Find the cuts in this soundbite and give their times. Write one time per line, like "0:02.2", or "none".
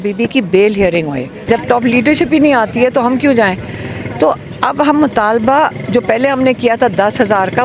0:01.3